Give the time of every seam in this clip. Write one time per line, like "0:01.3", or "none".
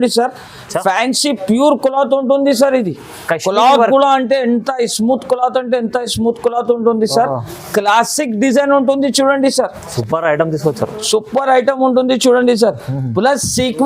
0:09.9